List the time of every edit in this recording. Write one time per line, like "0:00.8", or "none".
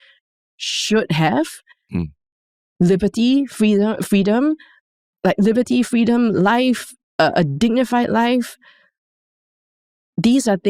none